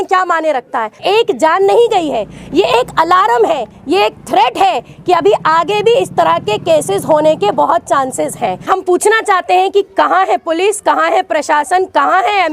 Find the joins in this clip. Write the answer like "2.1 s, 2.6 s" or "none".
1.0 s, 8.7 s